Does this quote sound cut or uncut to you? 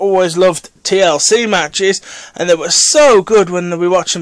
cut